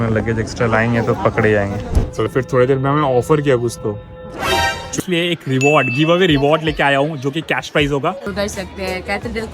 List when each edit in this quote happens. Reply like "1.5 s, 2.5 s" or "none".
2.3 s, 4.9 s, 8.2 s